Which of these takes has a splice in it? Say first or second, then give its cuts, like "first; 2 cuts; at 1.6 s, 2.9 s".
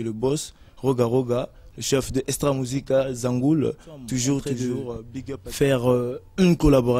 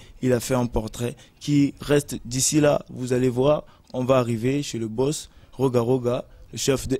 first; 1 cut; at 5.1 s